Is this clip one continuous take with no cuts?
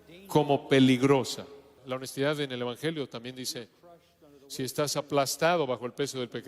no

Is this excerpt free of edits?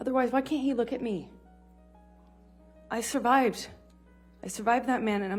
yes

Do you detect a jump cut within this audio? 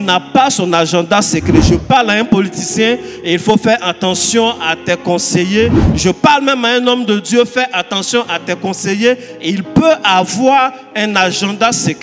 no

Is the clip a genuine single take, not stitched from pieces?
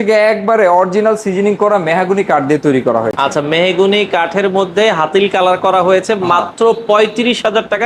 yes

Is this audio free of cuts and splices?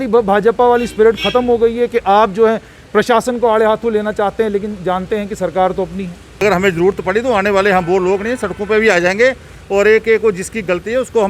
no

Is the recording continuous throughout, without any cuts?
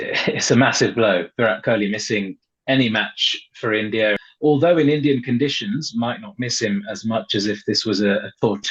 no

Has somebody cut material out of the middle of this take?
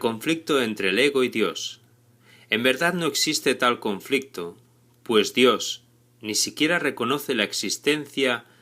yes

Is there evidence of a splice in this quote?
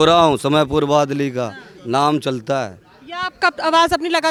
no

